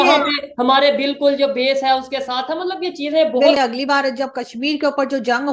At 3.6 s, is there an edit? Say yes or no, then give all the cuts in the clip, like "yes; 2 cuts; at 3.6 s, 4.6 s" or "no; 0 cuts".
yes; 1 cut; at 3.6 s